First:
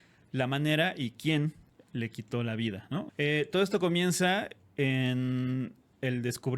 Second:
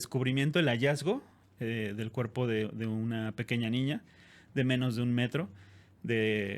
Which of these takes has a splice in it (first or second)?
first